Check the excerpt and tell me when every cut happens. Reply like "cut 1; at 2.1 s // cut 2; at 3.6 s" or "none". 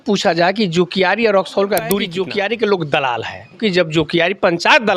cut 1; at 2.1 s // cut 2; at 3.6 s